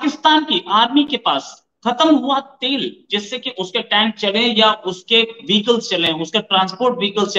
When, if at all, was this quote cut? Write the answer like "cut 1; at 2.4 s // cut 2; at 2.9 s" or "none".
none